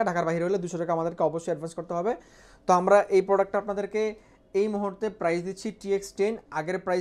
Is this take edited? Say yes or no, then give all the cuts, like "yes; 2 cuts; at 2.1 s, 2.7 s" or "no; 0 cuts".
no; 0 cuts